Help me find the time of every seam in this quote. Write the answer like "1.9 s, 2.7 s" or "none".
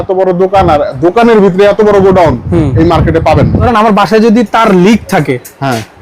3.6 s